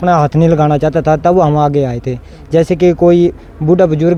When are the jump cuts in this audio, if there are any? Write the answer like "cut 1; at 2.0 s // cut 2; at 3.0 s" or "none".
none